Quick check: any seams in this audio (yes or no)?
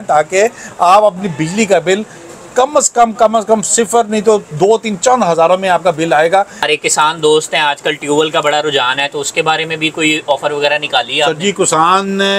yes